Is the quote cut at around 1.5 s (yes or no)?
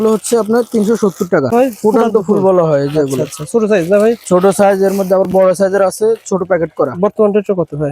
yes